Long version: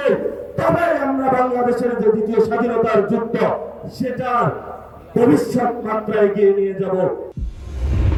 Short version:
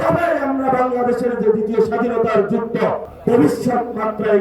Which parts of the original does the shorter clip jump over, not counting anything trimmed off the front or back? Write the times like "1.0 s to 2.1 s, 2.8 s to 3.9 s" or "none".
3.7 s to 5.0 s